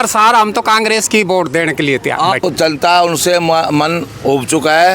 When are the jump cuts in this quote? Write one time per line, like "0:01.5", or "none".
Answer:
0:02.4